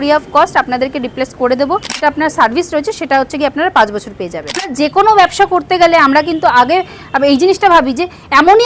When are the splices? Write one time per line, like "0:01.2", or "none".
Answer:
0:02.0
0:04.7